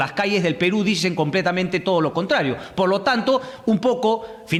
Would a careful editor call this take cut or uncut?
uncut